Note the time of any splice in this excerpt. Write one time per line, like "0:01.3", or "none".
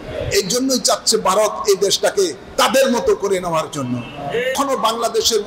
0:04.5